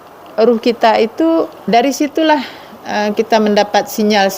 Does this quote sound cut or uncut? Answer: cut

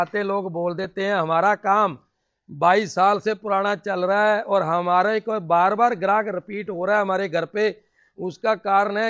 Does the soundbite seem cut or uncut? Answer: uncut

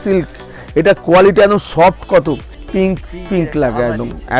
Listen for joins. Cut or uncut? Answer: cut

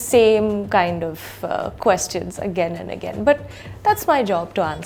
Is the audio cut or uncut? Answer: uncut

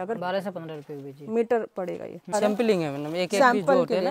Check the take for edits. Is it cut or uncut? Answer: cut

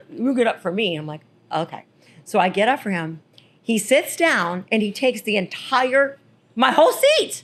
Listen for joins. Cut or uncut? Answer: uncut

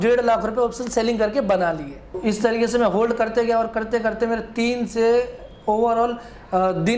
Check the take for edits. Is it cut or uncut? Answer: cut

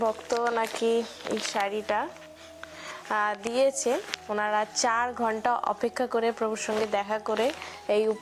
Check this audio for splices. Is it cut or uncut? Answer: uncut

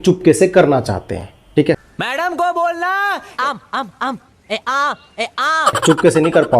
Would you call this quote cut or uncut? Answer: uncut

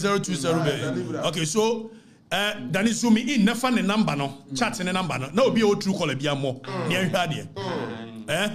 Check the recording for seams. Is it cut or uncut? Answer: uncut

